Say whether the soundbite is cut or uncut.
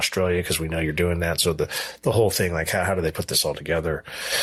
uncut